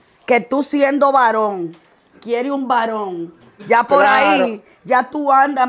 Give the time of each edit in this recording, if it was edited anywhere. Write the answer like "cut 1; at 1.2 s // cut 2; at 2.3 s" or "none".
none